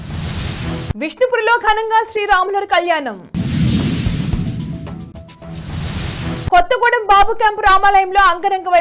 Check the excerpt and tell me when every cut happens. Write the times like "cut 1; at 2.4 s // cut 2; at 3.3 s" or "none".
cut 1; at 0.9 s